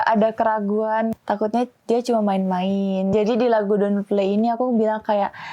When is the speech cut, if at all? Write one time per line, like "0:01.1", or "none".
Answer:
0:01.1
0:03.1